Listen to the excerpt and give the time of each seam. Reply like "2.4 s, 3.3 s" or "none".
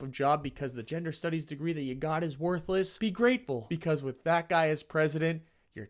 2.9 s, 3.7 s